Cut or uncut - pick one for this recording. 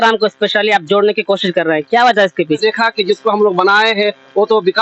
cut